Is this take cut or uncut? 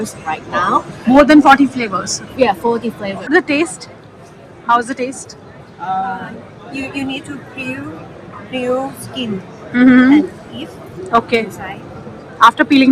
cut